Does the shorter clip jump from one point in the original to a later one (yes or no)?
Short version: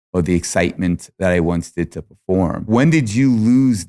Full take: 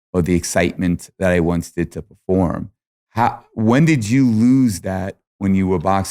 yes